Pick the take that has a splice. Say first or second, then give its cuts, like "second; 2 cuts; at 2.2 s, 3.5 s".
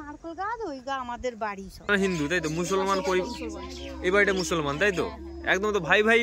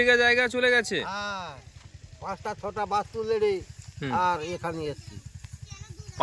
first; 1 cut; at 1.7 s